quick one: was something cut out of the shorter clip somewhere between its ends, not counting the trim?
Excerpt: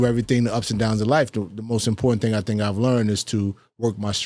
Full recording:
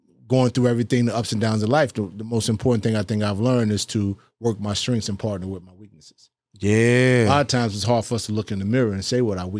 no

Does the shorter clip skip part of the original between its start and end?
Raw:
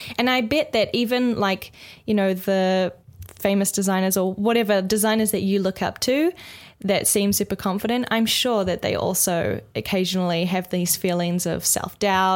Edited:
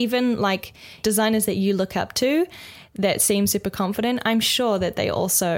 yes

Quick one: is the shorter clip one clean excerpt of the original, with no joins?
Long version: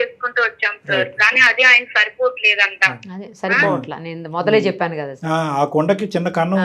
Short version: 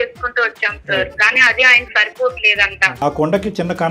no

